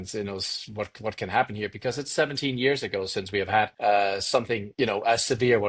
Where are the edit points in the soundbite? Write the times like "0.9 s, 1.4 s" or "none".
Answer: 3.7 s, 4.6 s